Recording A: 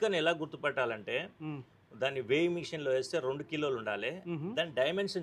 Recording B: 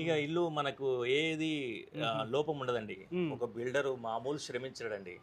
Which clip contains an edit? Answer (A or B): B